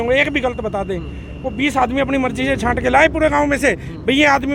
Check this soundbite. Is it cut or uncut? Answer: uncut